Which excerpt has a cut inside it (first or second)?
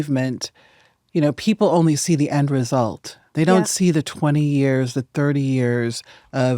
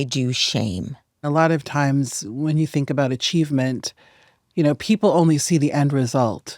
second